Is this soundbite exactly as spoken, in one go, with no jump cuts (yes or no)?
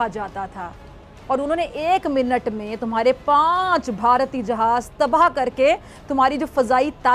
yes